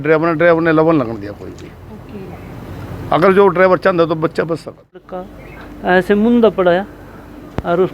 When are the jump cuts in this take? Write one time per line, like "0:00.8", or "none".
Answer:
0:05.1